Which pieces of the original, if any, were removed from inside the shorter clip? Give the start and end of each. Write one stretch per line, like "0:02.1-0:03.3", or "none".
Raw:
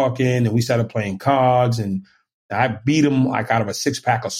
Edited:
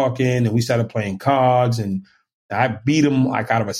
none